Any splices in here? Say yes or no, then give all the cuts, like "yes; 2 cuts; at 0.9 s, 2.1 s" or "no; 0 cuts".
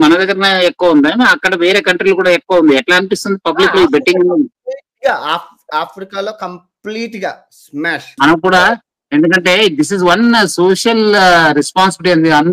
no; 0 cuts